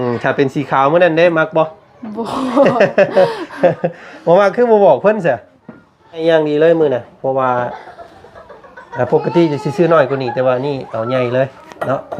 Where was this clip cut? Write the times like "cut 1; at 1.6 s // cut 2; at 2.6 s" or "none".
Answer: cut 1; at 6.2 s

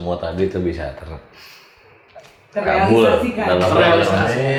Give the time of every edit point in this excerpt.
none

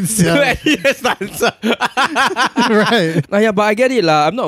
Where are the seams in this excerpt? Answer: cut 1; at 3.3 s

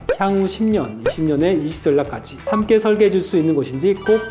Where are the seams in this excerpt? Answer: none

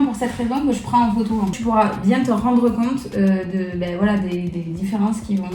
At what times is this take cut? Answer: none

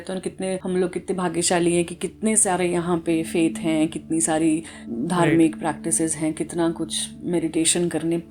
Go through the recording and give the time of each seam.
none

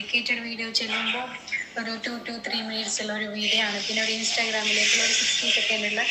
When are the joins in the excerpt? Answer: none

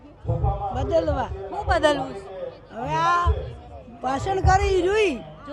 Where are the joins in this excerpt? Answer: none

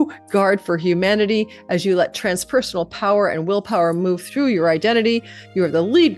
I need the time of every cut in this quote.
none

